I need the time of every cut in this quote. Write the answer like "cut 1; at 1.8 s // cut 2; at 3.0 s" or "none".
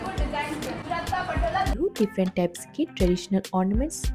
cut 1; at 1.8 s

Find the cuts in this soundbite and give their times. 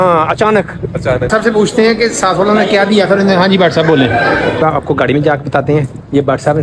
cut 1; at 1.3 s // cut 2; at 4.6 s

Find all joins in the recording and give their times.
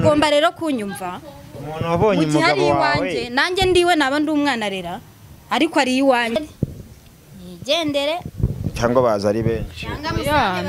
cut 1; at 6.4 s

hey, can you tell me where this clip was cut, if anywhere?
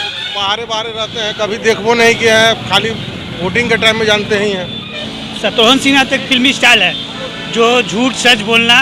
cut 1; at 5.0 s

